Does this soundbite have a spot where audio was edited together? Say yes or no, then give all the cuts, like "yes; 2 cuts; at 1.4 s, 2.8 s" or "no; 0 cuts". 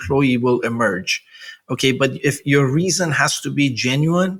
no; 0 cuts